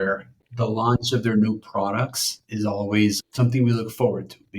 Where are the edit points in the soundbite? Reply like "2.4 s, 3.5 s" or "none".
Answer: 2.4 s